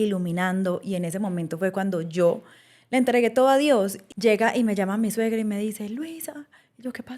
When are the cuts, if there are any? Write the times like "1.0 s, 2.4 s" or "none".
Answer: 4.0 s

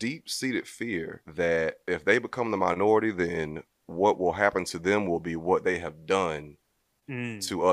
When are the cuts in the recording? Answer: 1.2 s, 1.8 s

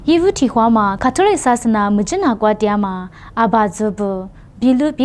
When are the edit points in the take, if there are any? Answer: none

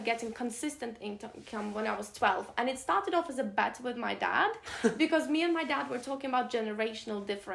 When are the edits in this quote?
none

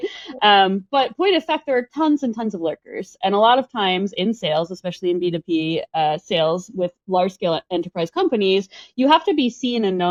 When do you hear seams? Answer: none

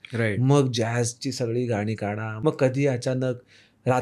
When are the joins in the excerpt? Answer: 2.3 s

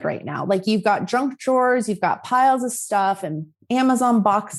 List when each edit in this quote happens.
none

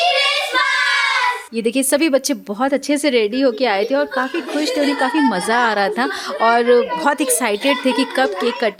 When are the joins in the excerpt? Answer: none

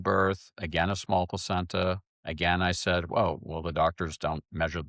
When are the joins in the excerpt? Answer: none

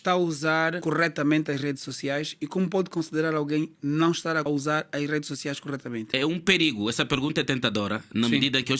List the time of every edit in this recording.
0.8 s, 4.4 s, 6.1 s

